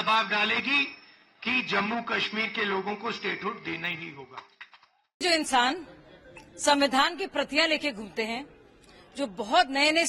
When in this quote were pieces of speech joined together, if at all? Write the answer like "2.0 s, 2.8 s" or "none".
none